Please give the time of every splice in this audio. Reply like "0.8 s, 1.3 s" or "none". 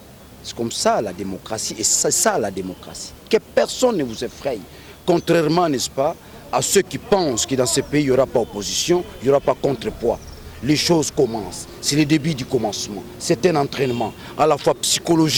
none